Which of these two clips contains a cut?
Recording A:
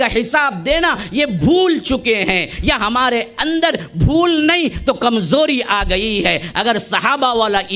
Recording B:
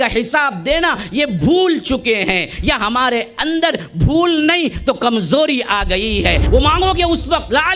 B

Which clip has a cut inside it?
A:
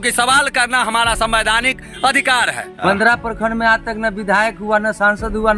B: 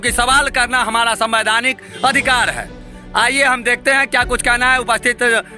A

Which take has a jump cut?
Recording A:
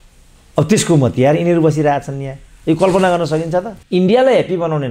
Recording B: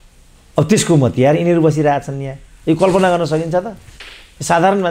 A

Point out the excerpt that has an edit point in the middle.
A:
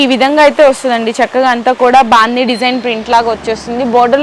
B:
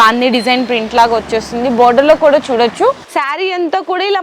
B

